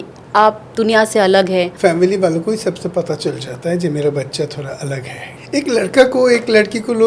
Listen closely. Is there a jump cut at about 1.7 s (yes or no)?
yes